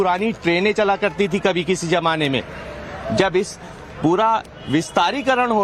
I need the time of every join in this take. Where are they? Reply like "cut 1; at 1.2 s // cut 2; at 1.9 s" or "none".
cut 1; at 1.6 s